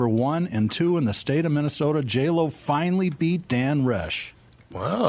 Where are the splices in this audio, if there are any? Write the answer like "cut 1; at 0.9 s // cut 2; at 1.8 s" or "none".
none